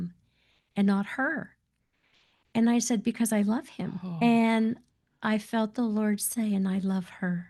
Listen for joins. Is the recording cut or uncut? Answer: uncut